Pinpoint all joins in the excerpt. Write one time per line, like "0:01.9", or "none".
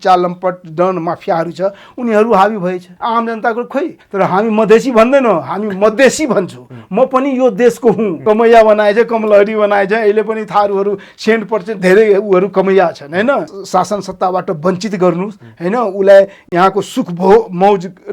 0:02.9
0:04.0
0:08.1
0:13.5